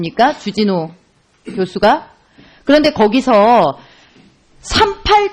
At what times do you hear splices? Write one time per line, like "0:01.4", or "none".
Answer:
0:03.4